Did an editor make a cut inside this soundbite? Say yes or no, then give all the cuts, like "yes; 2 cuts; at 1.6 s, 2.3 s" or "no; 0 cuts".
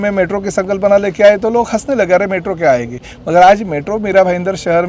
no; 0 cuts